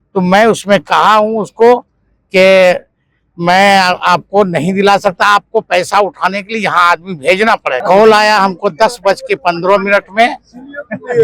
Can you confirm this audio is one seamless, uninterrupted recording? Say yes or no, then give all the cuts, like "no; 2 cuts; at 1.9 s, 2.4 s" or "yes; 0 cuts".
no; 1 cut; at 7.8 s